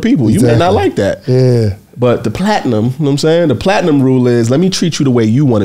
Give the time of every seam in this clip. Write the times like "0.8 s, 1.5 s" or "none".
none